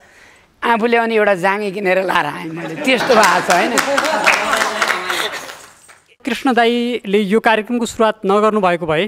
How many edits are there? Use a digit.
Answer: 2